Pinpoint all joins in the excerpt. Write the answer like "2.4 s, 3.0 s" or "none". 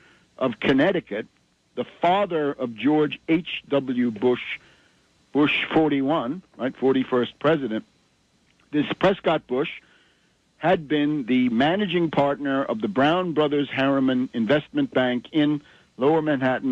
8.2 s